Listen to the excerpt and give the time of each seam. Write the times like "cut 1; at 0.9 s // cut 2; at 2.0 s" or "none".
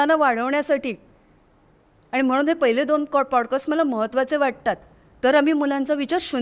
none